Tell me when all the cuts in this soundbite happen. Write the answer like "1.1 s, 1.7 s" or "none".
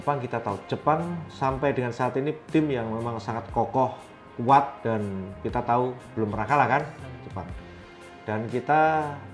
none